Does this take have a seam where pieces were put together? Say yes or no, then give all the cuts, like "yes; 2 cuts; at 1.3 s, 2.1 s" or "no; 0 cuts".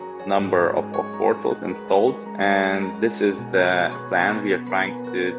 yes; 1 cut; at 2.3 s